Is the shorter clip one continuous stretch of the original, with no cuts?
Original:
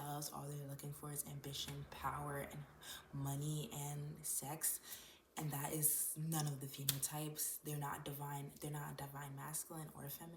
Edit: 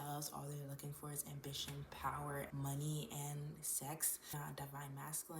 no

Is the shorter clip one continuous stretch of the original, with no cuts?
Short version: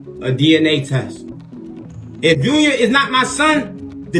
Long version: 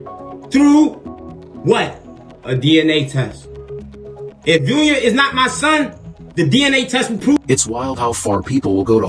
yes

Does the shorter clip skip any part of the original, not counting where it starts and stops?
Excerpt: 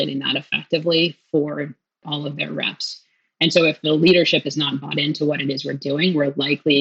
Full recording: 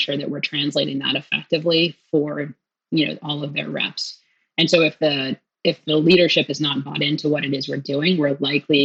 yes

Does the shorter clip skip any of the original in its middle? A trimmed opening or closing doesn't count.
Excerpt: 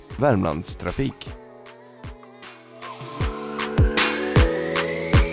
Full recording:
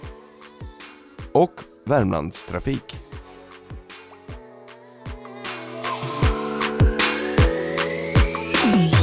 yes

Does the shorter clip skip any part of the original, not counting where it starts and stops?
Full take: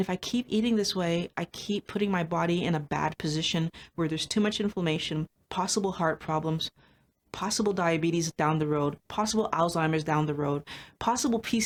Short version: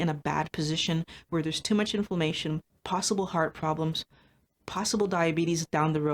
no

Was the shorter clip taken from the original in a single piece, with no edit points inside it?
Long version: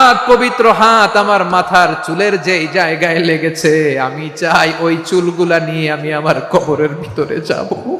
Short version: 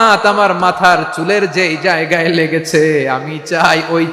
yes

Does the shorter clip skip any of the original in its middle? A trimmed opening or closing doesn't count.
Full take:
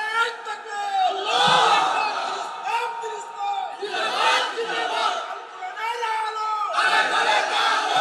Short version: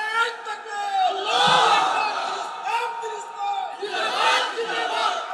no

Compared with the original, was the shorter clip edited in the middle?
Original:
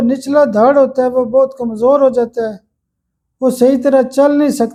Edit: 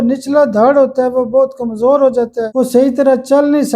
yes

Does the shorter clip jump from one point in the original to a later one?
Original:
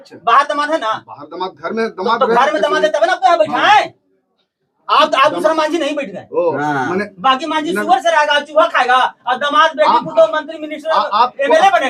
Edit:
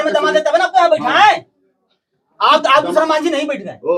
no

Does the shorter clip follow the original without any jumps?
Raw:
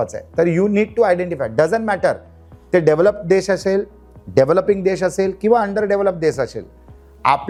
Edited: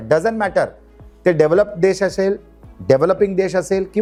yes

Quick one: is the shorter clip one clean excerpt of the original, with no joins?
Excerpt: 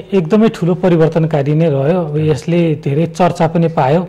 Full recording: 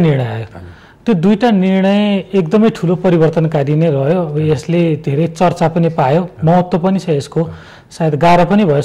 yes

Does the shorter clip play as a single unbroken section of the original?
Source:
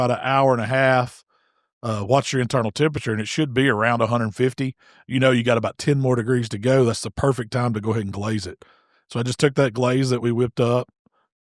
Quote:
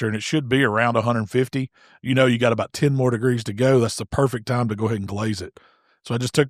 yes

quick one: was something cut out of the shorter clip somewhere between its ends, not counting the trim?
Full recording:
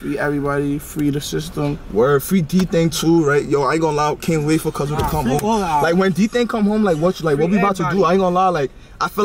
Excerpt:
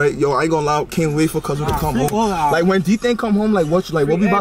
no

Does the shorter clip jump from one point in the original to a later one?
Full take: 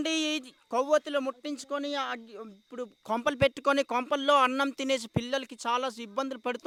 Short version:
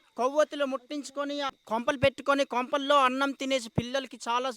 yes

